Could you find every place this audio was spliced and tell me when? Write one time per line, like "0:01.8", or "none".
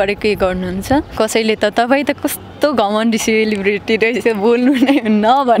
0:01.1